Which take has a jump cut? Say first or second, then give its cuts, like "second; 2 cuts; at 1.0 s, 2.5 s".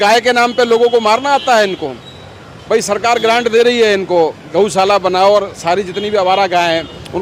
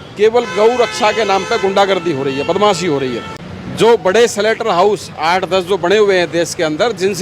second; 1 cut; at 3.3 s